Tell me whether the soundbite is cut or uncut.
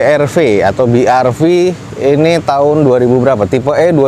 uncut